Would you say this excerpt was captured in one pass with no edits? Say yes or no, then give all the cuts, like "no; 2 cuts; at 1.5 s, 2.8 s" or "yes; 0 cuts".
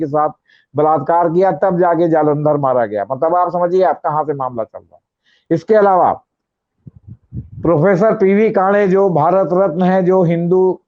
yes; 0 cuts